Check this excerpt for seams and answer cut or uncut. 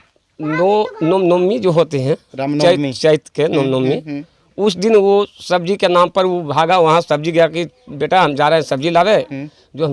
uncut